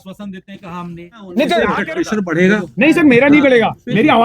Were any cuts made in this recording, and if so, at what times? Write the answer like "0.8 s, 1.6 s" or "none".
1.6 s